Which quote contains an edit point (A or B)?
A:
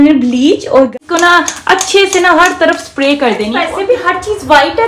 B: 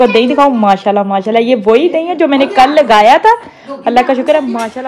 A